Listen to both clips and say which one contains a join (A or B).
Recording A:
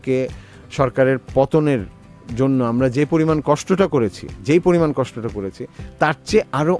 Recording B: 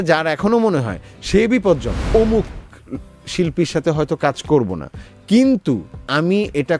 B